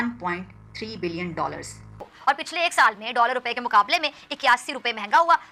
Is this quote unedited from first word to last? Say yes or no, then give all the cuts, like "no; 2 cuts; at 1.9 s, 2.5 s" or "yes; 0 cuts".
no; 1 cut; at 2.0 s